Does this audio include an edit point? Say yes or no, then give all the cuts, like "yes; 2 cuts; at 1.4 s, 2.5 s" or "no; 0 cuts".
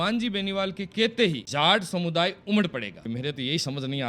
yes; 2 cuts; at 1.4 s, 2.9 s